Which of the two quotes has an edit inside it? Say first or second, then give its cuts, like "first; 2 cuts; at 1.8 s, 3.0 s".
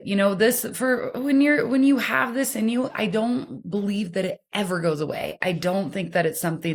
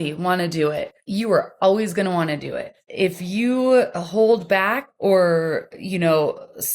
second; 3 cuts; at 0.9 s, 2.8 s, 4.9 s